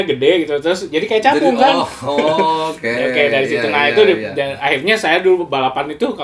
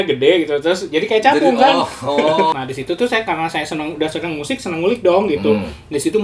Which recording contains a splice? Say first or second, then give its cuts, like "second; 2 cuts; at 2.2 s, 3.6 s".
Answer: second; 1 cut; at 2.5 s